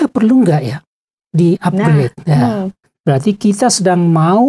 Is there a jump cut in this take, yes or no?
yes